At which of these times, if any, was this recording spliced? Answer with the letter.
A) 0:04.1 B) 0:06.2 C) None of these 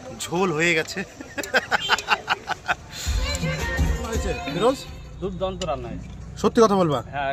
A